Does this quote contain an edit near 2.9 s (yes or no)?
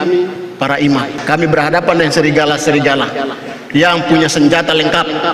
no